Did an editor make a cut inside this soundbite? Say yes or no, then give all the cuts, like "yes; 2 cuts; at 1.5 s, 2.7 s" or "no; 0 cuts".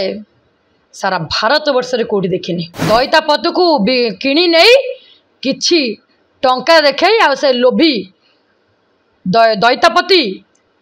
yes; 1 cut; at 2.7 s